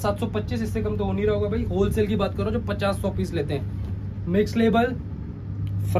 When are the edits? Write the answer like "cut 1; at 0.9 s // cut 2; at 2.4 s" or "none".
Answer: none